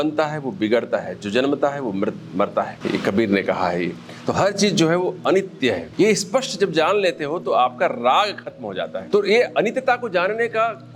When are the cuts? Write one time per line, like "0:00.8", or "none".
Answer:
0:02.8
0:05.8
0:09.0